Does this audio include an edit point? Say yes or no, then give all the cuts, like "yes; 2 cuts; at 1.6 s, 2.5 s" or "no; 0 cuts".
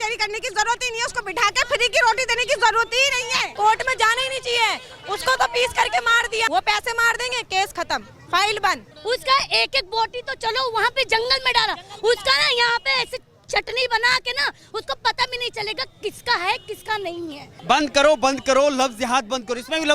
yes; 4 cuts; at 3.5 s, 6.5 s, 8.9 s, 17.5 s